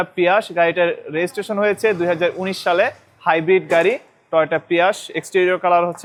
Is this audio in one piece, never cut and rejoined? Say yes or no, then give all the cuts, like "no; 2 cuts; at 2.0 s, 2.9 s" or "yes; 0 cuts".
yes; 0 cuts